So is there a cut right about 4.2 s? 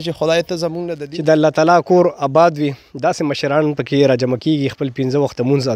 no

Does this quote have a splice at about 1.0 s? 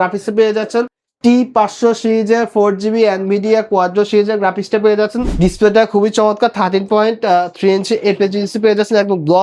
yes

